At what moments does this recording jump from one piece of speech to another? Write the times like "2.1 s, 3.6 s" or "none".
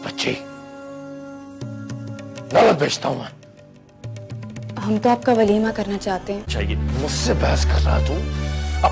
6.5 s